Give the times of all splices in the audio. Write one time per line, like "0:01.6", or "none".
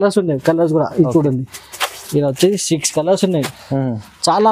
none